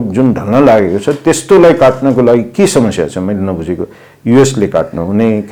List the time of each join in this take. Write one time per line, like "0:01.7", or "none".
none